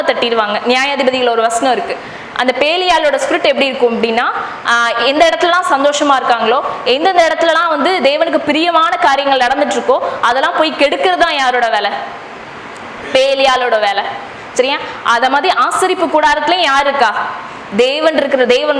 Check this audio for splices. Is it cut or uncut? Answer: uncut